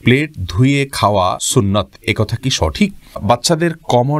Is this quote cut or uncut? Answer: cut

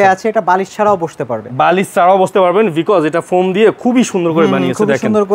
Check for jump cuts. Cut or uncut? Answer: uncut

